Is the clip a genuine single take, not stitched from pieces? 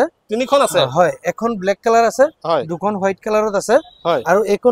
yes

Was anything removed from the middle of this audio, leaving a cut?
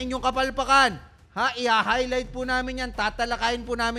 no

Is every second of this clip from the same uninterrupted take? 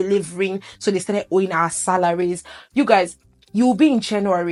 yes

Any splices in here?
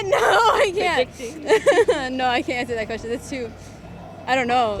no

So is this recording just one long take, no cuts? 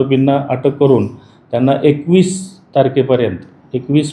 yes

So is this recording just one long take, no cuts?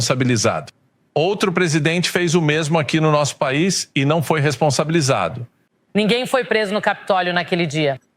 no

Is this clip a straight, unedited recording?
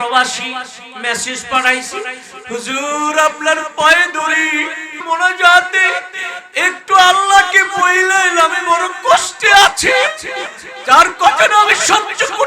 no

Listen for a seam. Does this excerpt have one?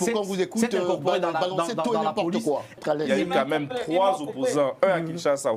yes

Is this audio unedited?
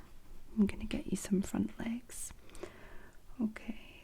yes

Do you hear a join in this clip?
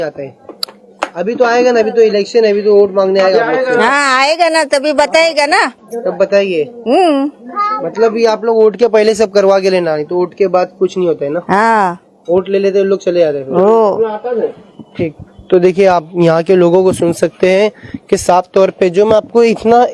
no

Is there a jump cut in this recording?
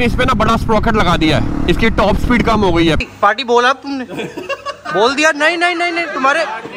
yes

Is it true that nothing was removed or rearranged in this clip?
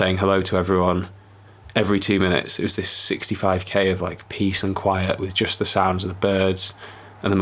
yes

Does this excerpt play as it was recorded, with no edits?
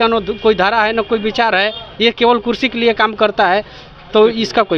yes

